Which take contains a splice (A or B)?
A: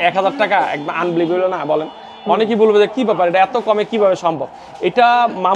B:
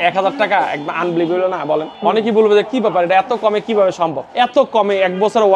B